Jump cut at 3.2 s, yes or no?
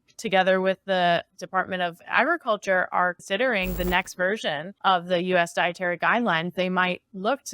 yes